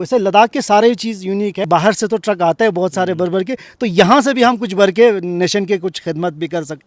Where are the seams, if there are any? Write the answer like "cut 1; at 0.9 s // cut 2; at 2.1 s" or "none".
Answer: cut 1; at 1.7 s